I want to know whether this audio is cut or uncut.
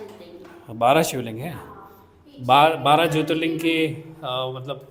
uncut